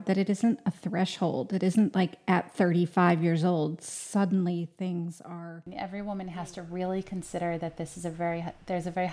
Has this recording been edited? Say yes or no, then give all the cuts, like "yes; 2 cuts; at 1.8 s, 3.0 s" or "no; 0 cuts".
yes; 1 cut; at 5.7 s